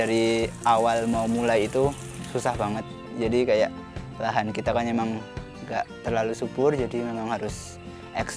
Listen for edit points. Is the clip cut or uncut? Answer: uncut